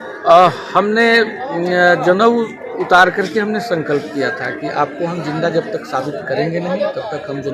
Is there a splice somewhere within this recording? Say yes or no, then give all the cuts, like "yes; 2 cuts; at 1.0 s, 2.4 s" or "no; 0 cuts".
no; 0 cuts